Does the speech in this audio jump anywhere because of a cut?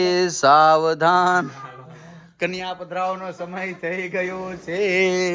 no; 0 cuts

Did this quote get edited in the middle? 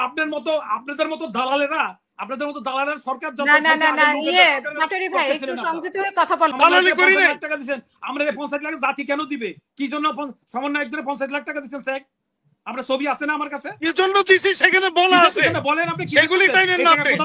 yes; 1 cut; at 6.5 s

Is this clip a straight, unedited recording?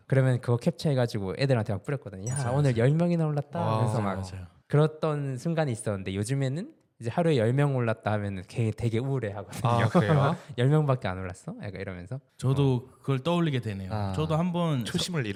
yes; 0 cuts

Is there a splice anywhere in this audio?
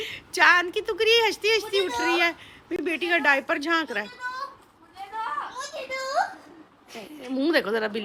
no; 0 cuts

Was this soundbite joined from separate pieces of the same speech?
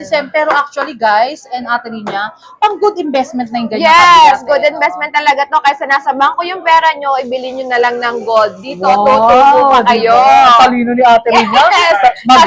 no; 0 cuts

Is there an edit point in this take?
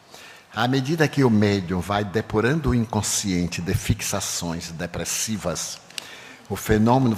yes; 1 cut; at 2.7 s

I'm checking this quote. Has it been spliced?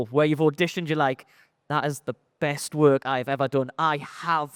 no; 0 cuts

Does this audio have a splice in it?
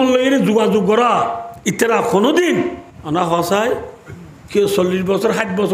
yes; 2 cuts; at 1.5 s, 2.9 s

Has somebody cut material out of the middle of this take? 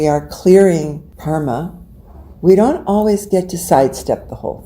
yes; 1 cut; at 1.1 s

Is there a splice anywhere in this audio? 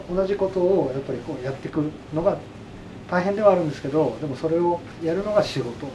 no; 0 cuts

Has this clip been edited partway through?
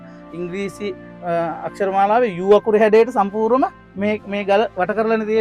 no; 0 cuts

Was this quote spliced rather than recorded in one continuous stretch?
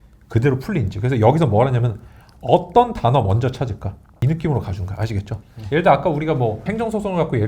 no; 0 cuts

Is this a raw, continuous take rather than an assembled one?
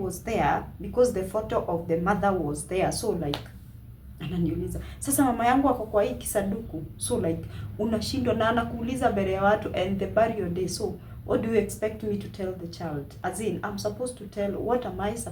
yes; 0 cuts

